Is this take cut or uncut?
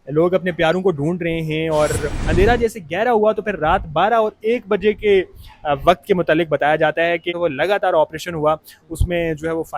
cut